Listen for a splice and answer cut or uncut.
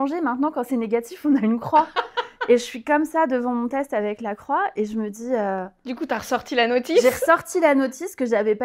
uncut